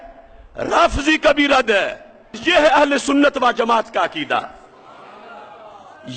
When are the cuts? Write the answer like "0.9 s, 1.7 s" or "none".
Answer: 2.4 s